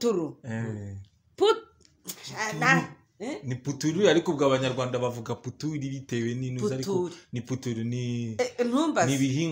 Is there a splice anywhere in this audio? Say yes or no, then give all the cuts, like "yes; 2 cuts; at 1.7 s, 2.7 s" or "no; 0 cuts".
no; 0 cuts